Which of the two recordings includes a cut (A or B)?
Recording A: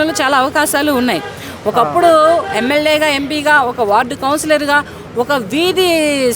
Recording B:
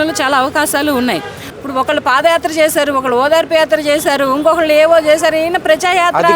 B